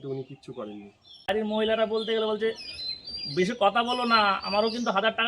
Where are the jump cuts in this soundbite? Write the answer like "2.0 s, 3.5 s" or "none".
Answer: 1.2 s